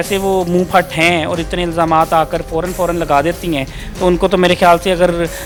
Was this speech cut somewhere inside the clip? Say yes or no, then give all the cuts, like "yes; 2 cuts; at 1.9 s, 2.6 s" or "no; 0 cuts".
no; 0 cuts